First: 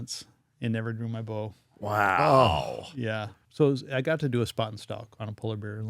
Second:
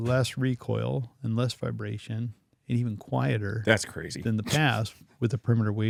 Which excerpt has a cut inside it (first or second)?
first